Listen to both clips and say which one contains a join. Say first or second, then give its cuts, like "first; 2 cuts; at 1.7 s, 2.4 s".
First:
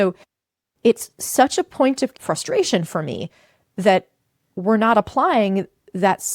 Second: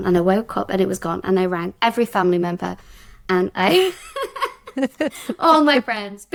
first; 1 cut; at 2.2 s